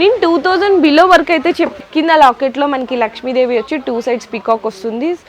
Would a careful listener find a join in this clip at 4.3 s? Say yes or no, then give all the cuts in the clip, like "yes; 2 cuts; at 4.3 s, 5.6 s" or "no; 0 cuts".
no; 1 cut; at 1.7 s